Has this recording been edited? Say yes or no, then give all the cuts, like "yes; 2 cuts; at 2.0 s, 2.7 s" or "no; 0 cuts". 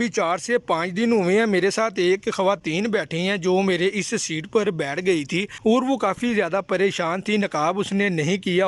no; 0 cuts